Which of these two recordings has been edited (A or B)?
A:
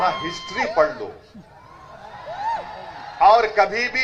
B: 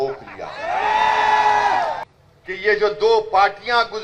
B